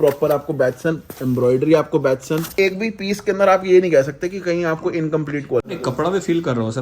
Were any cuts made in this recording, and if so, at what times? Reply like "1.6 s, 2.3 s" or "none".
2.5 s, 5.6 s

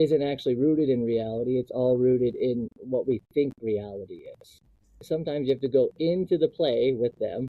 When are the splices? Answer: 5.0 s

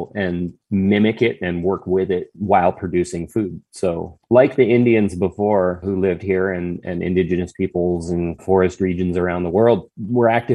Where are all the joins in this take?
none

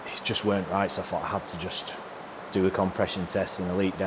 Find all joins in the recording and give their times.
none

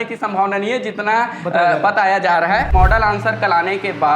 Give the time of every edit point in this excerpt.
2.7 s

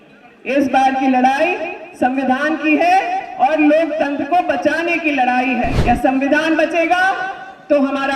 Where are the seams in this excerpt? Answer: 5.8 s

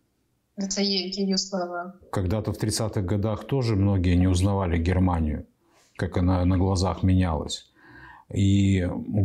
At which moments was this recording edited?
none

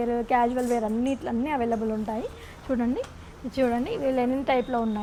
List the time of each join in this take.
none

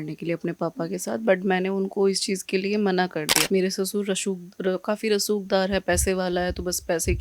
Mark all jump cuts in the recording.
3.4 s

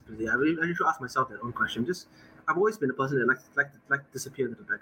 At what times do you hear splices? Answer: none

